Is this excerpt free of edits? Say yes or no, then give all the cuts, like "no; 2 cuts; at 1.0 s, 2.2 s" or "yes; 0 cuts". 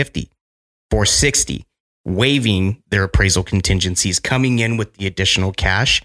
yes; 0 cuts